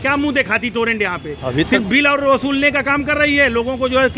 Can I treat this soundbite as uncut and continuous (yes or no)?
yes